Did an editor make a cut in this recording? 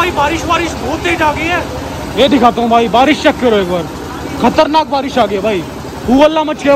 no; 0 cuts

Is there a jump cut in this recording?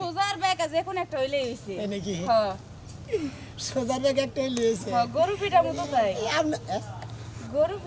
no; 0 cuts

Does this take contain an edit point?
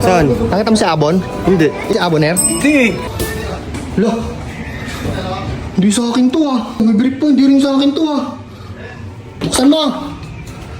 yes; 3 cuts; at 3.1 s, 6.8 s, 9.3 s

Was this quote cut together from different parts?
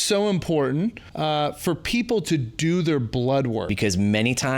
yes; 2 cuts; at 1.1 s, 3.7 s

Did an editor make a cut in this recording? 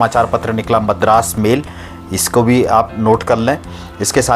no; 0 cuts

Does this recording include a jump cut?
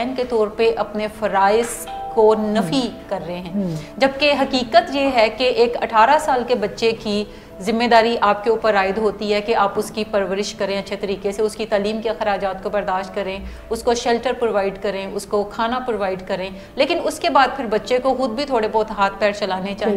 no; 0 cuts

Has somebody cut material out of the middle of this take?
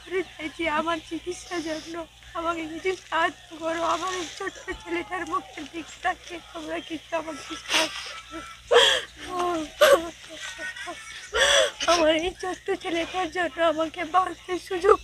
no; 0 cuts

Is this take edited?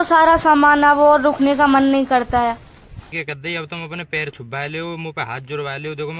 yes; 1 cut; at 3.1 s

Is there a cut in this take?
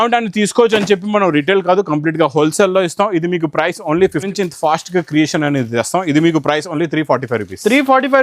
yes; 1 cut; at 4.3 s

